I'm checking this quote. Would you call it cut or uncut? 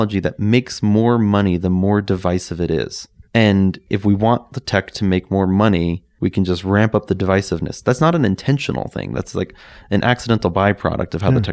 uncut